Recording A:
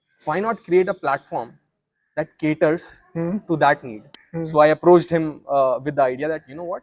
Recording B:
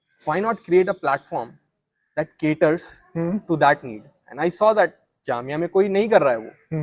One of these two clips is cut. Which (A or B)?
A